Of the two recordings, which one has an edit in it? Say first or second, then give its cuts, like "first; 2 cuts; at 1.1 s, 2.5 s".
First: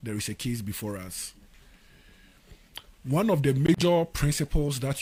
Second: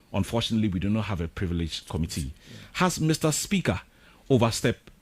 second; 1 cut; at 1.8 s